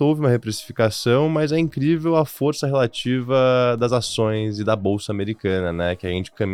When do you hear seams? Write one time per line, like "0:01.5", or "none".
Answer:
none